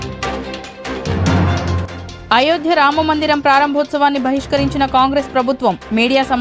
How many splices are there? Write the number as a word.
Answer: zero